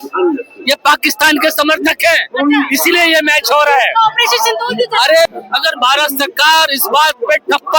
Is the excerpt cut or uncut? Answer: cut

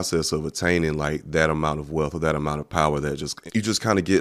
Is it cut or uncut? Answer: cut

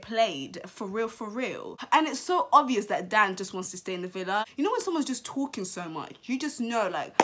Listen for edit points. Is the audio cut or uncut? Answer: cut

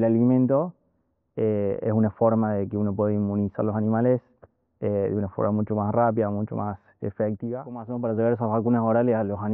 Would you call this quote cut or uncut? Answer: cut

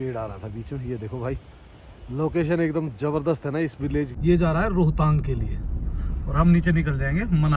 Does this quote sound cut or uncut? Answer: cut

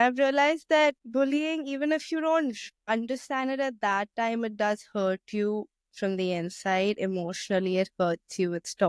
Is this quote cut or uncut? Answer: cut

